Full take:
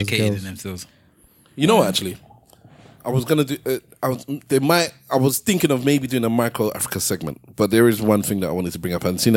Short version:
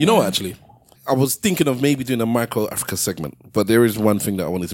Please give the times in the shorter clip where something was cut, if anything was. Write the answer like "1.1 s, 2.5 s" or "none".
0.9 s